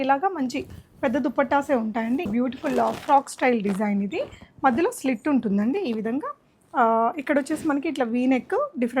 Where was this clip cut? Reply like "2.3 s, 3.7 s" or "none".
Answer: 2.3 s